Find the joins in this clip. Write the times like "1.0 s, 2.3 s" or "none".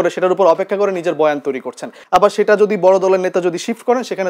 1.9 s